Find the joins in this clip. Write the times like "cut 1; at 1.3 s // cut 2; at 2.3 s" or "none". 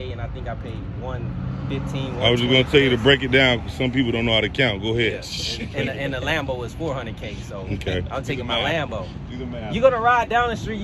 none